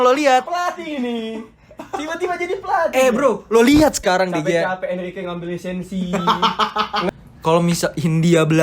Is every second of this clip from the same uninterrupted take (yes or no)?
no